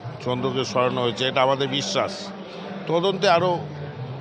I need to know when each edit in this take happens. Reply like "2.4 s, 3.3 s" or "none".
none